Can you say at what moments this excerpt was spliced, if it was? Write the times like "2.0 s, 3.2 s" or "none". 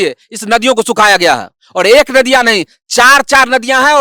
none